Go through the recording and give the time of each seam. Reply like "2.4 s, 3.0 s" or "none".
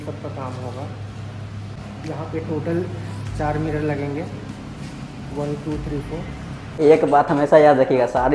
6.7 s